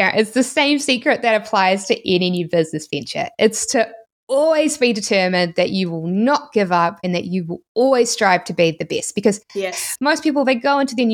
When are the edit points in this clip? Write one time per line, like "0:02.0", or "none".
0:09.7